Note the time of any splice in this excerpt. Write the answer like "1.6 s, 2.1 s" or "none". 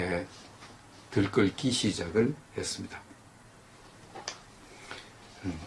4.5 s